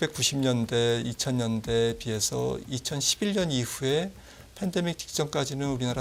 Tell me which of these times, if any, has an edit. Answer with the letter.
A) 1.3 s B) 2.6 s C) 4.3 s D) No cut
D